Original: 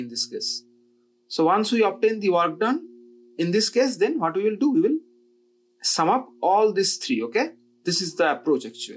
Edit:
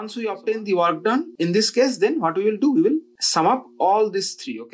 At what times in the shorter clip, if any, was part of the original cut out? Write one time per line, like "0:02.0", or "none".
0:01.3
0:03.2